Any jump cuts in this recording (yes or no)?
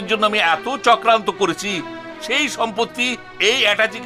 no